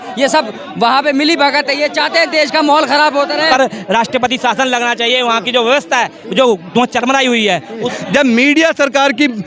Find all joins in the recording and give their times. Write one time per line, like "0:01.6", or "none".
0:03.5
0:07.9